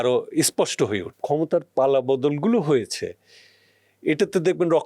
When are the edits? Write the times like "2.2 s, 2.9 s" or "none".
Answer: 1.1 s